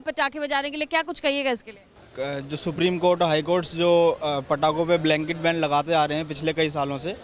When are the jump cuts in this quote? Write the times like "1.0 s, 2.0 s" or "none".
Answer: none